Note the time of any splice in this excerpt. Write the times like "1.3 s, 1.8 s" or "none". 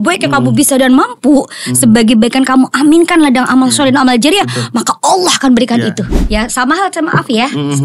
6.1 s